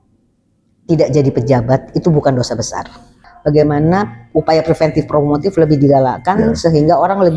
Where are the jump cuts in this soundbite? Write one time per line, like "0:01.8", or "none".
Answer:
0:03.2